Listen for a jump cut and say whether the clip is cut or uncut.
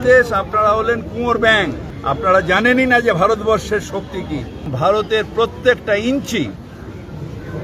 cut